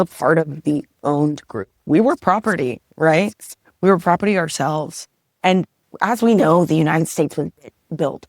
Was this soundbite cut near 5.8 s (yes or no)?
yes